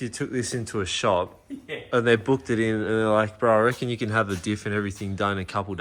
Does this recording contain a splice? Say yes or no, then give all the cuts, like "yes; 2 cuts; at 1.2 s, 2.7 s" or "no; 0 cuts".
no; 0 cuts